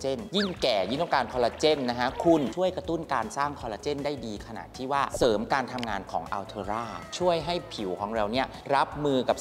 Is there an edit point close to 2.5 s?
yes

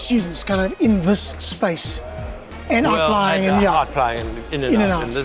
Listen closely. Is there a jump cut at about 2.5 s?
no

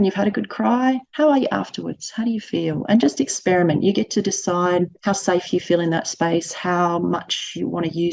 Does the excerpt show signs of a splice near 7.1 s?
no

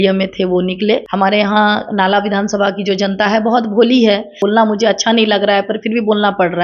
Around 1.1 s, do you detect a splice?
yes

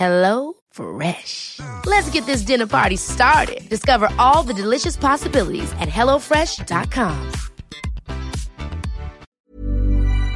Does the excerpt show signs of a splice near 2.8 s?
no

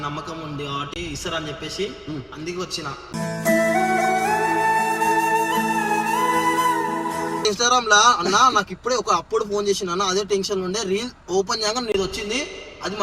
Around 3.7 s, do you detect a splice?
no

